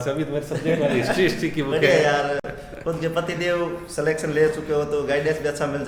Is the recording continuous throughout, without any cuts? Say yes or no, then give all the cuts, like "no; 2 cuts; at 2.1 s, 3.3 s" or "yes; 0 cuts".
yes; 0 cuts